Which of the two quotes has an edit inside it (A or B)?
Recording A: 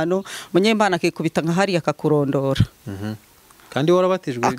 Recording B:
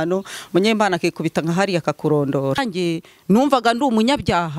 B